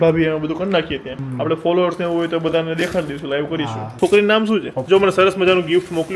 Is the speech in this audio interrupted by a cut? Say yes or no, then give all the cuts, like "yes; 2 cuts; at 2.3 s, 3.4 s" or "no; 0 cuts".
yes; 3 cuts; at 1.2 s, 3.8 s, 4.8 s